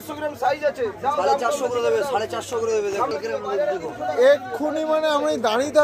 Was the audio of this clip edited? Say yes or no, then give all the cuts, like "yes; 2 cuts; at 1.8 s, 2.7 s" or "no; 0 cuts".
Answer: no; 0 cuts